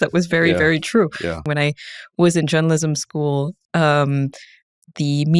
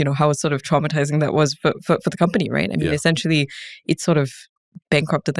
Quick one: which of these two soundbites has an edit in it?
first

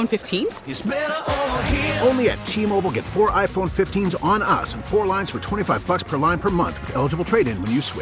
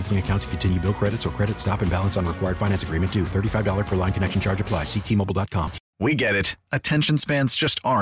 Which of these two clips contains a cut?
second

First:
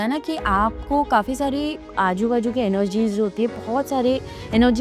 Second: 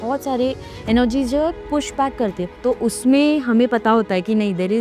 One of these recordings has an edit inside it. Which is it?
second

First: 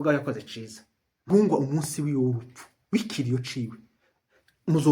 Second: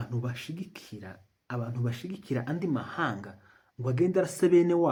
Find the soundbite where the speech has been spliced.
first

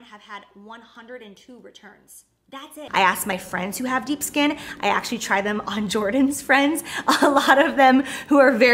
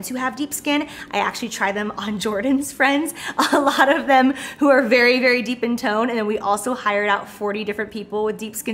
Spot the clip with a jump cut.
first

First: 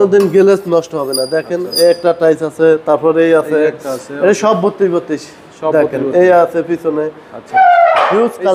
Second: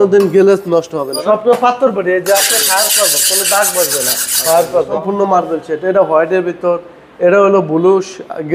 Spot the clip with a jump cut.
second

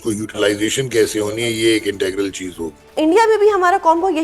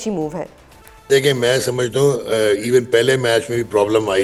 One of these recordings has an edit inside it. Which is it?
first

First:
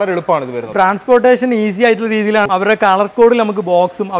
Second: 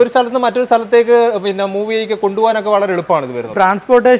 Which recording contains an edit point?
first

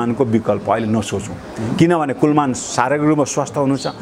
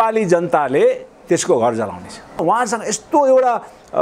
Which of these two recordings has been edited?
second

